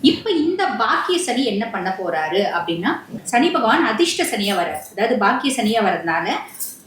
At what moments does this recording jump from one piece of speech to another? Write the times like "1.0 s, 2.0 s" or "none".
3.1 s